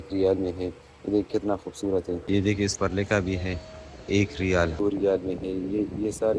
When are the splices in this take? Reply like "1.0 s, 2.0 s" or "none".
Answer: 2.3 s, 4.7 s